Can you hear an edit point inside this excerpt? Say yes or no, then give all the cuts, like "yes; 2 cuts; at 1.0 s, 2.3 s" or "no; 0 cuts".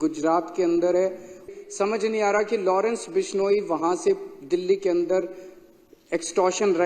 yes; 1 cut; at 1.5 s